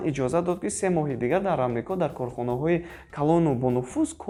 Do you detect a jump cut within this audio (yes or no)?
no